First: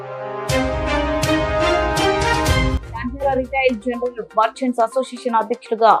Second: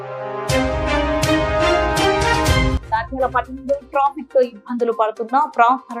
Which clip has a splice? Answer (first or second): second